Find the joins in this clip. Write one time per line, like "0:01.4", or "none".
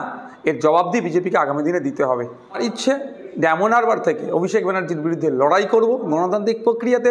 0:02.6